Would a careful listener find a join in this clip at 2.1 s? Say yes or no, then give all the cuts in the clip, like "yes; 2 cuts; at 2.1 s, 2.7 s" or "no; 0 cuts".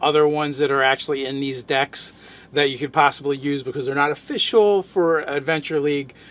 yes; 1 cut; at 2.1 s